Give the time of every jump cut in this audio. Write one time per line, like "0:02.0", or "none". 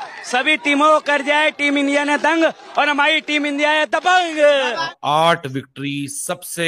0:04.9